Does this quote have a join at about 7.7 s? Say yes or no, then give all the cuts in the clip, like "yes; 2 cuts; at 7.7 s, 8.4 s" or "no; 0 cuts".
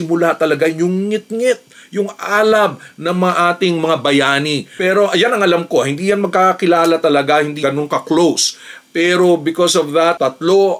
yes; 2 cuts; at 4.7 s, 7.7 s